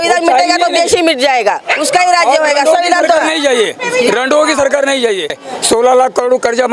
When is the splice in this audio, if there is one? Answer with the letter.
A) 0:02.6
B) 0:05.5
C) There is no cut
B